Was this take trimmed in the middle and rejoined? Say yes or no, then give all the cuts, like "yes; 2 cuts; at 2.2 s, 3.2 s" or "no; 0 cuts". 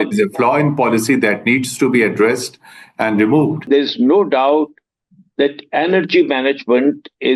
yes; 1 cut; at 3.6 s